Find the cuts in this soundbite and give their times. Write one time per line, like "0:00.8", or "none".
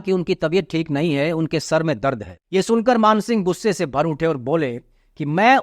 0:02.3